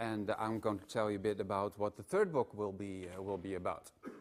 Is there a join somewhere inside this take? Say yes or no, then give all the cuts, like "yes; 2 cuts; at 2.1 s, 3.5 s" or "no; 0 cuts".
no; 0 cuts